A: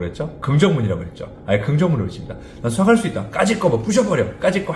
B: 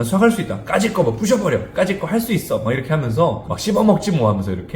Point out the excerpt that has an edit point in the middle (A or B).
B